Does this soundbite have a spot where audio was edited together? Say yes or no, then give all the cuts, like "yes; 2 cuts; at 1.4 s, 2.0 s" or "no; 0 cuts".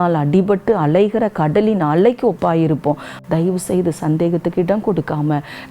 yes; 1 cut; at 3.1 s